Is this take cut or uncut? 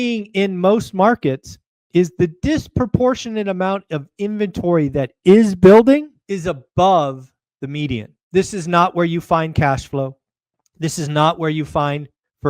cut